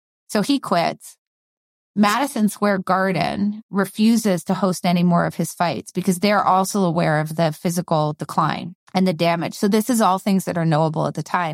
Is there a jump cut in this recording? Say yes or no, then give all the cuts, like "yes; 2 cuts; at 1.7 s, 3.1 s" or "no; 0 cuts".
yes; 1 cut; at 8.7 s